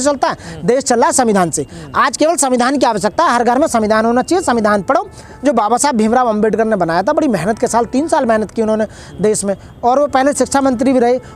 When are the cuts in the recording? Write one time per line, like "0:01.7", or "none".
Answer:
none